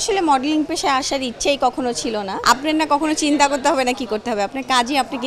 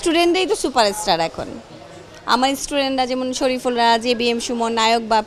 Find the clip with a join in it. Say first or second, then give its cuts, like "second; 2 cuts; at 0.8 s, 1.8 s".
first; 1 cut; at 2.3 s